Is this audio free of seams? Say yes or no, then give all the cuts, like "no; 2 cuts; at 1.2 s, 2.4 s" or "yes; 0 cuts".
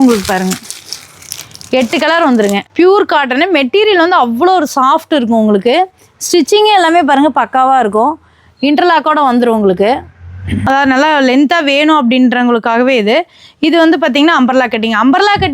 no; 2 cuts; at 2.6 s, 10.7 s